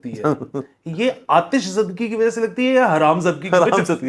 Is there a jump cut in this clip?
no; 0 cuts

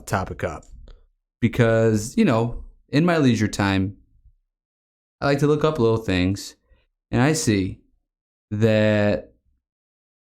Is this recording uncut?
yes; 0 cuts

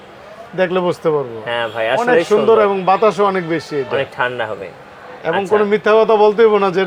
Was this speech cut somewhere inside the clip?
no; 0 cuts

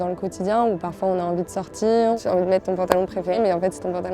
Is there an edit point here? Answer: yes; 2 cuts; at 2.2 s, 3.4 s

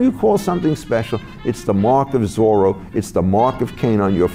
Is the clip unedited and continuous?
yes; 0 cuts

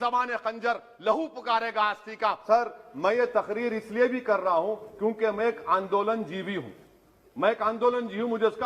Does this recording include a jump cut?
yes; 1 cut; at 2.4 s

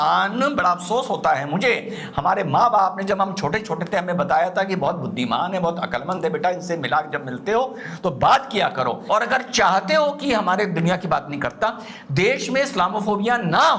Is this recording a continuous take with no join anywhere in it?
no; 1 cut; at 9.0 s

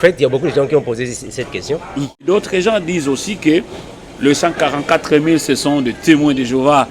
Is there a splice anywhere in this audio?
yes; 1 cut; at 2.2 s

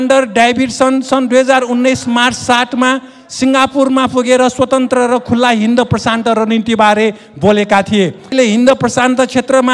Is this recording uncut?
no; 1 cut; at 8.3 s

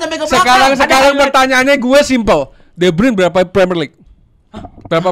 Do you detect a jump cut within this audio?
no; 0 cuts

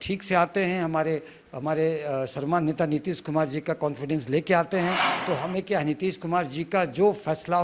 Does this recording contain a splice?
no; 0 cuts

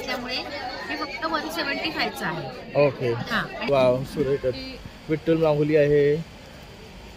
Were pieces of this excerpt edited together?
yes; 1 cut; at 3.6 s

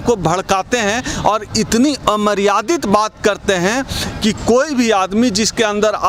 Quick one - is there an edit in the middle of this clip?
no; 0 cuts

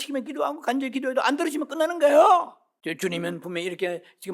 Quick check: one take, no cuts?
no; 1 cut; at 2.6 s

